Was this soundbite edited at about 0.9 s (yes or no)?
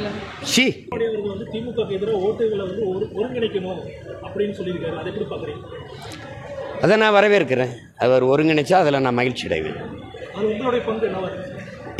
yes